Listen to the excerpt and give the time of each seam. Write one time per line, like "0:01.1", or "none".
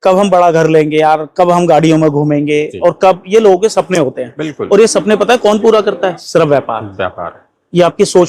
none